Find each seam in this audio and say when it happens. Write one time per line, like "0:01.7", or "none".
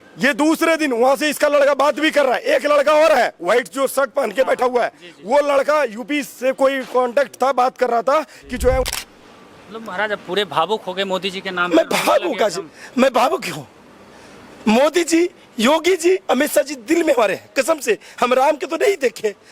0:08.8